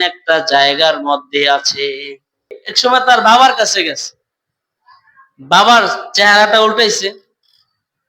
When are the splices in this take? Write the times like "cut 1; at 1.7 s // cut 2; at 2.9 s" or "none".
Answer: cut 1; at 2.6 s